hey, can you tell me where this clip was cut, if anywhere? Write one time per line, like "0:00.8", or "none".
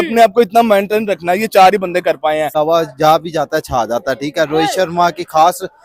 0:02.5

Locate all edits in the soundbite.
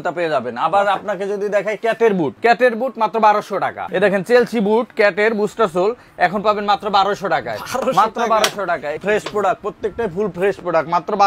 0:02.3
0:03.8
0:09.0

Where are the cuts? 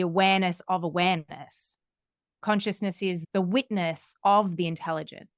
none

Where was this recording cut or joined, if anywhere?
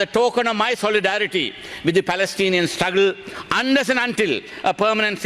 none

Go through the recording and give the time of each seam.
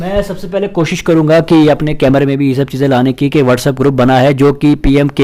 none

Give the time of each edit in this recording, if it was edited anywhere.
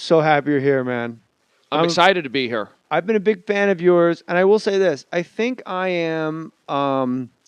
0:03.7

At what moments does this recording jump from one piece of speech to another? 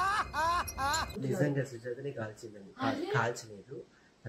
0:01.1

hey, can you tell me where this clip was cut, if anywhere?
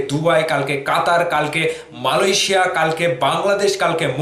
none

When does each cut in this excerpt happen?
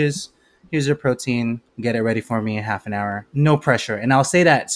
0:01.7
0:03.2

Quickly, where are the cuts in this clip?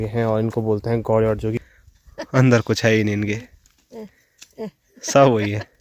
0:01.6

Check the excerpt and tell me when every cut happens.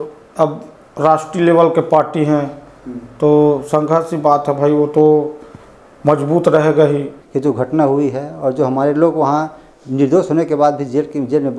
0:07.2

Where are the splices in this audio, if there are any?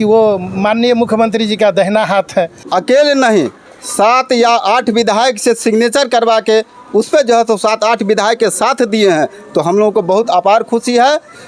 0:02.6

